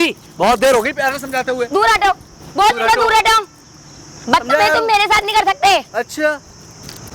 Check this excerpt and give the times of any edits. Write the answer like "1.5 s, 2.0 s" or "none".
none